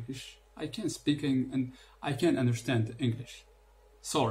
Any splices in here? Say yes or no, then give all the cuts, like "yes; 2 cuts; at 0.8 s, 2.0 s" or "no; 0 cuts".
no; 0 cuts